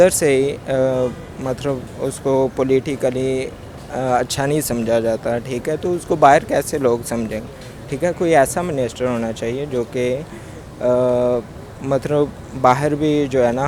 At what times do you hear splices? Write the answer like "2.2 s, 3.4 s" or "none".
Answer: none